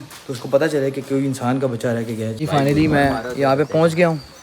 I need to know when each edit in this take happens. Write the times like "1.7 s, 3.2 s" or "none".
2.4 s